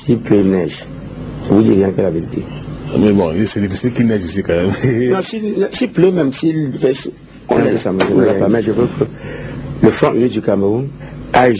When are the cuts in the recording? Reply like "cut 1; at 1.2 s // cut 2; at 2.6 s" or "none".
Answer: cut 1; at 8.4 s